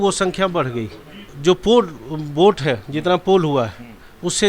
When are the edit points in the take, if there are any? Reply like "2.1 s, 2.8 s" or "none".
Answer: 1.3 s